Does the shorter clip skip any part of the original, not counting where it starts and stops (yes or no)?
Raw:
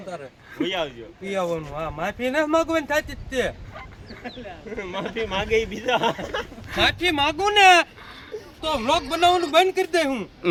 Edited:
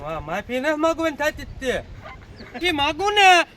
yes